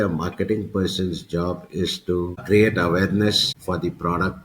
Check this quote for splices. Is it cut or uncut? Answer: cut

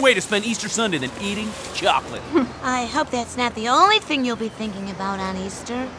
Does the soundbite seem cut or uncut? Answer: uncut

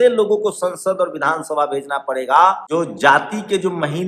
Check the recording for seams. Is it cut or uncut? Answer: cut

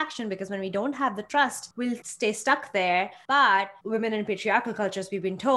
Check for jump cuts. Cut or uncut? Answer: cut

